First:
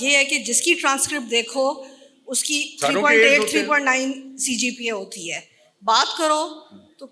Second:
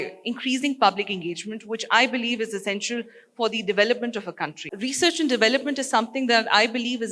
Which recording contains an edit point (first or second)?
second